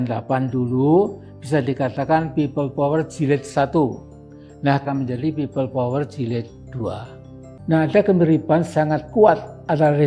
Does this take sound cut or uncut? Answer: cut